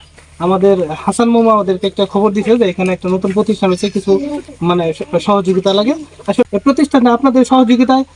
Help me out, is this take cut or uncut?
cut